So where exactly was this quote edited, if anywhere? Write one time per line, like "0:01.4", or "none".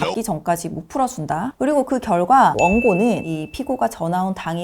0:01.5
0:02.5